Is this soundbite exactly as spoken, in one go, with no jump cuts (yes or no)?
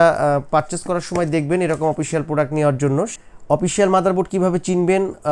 no